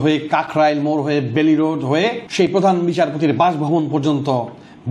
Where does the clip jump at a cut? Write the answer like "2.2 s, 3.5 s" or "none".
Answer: 2.2 s